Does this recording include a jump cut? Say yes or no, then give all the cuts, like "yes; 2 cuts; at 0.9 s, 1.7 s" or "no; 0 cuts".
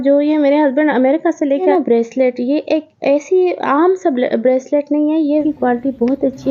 yes; 2 cuts; at 1.7 s, 5.4 s